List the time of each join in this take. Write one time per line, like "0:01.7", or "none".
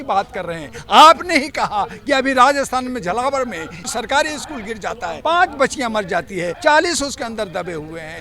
0:03.9
0:05.2
0:06.5